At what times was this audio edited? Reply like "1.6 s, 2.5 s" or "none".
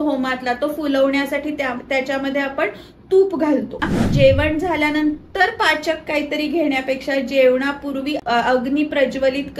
4.0 s, 8.2 s